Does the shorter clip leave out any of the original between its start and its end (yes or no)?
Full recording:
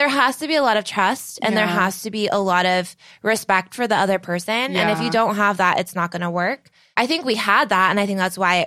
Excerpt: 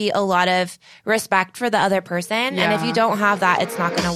no